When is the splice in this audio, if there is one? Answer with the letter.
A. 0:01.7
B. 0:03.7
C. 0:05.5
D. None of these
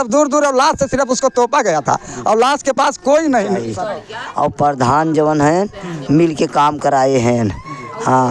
B